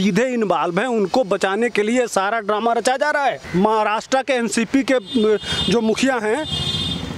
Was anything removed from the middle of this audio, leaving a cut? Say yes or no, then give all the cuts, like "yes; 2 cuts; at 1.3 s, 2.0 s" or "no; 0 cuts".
yes; 1 cut; at 3.4 s